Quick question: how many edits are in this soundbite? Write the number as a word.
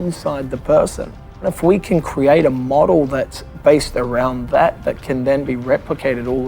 one